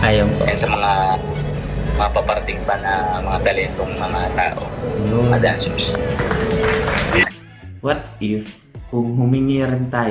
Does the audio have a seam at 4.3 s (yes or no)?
no